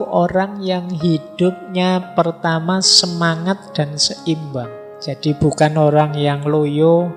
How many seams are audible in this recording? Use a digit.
1